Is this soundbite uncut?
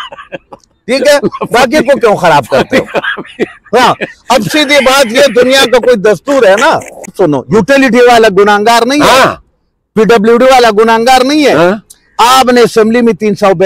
no; 1 cut; at 7.1 s

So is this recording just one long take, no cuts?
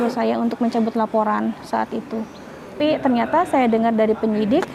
no; 1 cut; at 2.8 s

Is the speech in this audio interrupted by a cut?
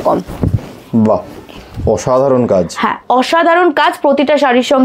no; 0 cuts

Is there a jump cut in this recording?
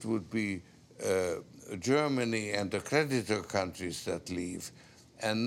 no; 0 cuts

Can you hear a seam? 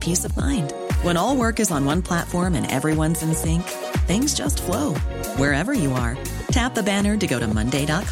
no; 0 cuts

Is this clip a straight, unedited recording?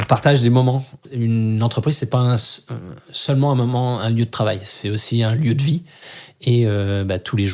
no; 1 cut; at 1.0 s

